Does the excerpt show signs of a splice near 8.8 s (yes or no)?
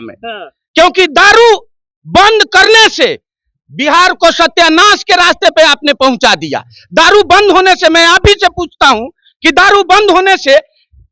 no